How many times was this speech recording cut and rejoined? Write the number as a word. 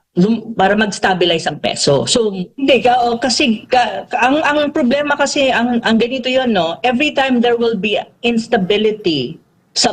one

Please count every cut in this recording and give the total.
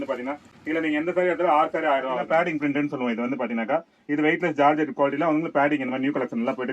one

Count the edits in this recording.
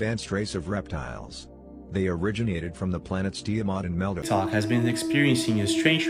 one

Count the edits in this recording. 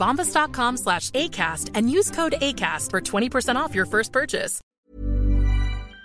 one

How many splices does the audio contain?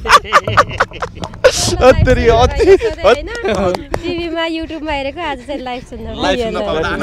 zero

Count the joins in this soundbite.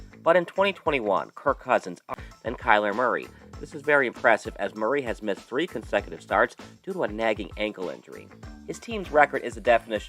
one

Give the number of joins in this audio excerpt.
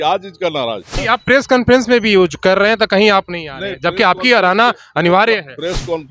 one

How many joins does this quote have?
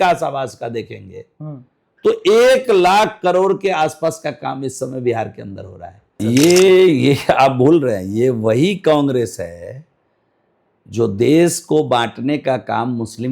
one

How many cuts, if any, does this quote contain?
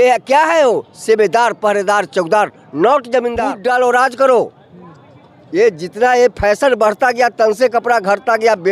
one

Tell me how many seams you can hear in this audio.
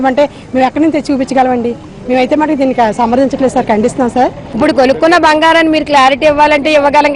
one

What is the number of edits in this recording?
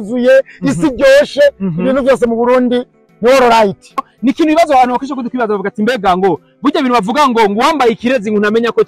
one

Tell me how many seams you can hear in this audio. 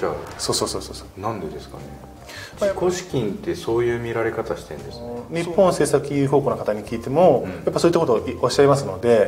two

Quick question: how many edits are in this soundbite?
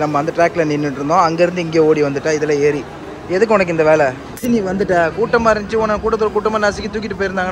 one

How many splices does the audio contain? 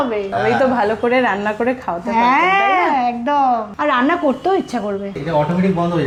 zero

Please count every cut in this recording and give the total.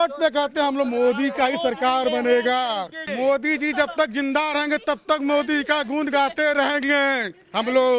one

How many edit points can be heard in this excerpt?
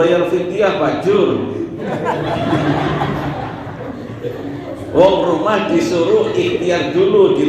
zero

